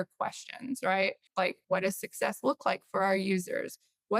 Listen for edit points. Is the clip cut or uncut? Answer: cut